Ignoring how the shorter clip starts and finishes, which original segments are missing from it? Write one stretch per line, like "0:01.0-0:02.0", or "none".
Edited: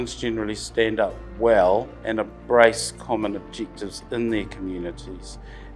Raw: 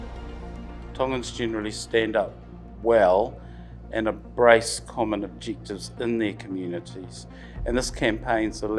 0:02.4-0:02.7
0:03.4-0:03.9